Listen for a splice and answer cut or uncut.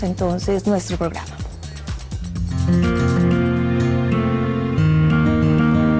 uncut